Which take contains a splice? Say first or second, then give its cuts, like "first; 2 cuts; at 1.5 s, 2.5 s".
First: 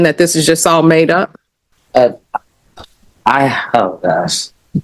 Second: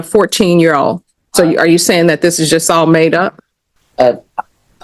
second; 1 cut; at 0.9 s